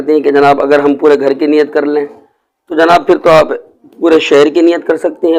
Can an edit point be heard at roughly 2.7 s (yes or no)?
no